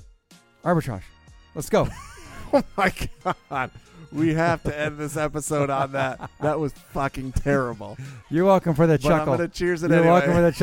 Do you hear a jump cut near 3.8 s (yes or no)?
no